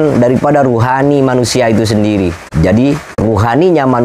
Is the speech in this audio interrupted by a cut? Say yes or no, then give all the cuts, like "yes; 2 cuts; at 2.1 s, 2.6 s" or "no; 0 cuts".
yes; 2 cuts; at 2.4 s, 3.1 s